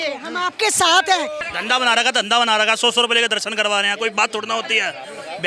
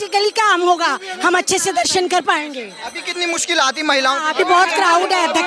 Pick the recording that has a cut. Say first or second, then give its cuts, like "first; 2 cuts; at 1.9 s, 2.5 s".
first; 1 cut; at 1.4 s